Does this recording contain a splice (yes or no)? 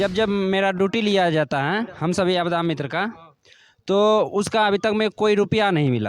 no